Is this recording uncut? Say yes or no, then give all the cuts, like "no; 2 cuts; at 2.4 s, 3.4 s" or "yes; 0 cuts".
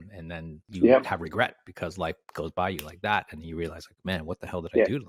yes; 0 cuts